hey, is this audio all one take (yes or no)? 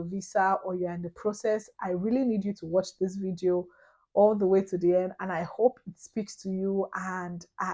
yes